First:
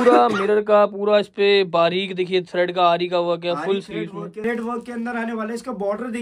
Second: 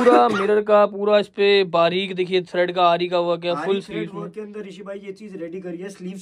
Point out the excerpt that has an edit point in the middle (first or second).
first